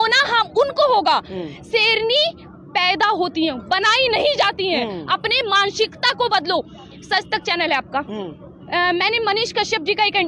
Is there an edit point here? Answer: no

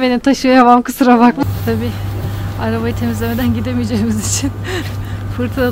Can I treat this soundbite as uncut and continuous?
no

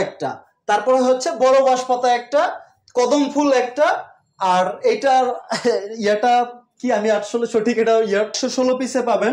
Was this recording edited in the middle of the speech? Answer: yes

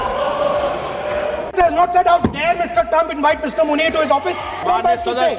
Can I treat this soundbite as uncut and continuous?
no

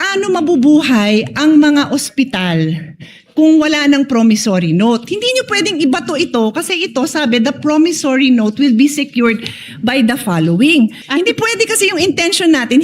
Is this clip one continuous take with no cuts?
no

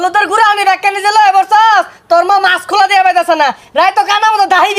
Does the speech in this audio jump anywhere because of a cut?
no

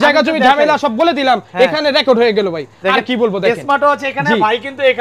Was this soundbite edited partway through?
no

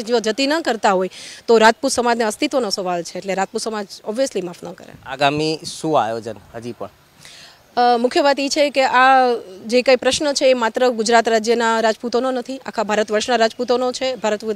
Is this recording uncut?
yes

